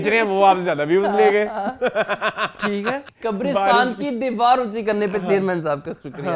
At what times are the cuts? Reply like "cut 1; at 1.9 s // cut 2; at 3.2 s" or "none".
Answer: cut 1; at 3.1 s